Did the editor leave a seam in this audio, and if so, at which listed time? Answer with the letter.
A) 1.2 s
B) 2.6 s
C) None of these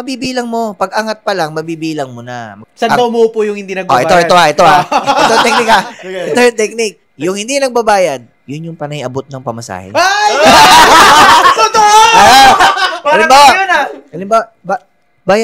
B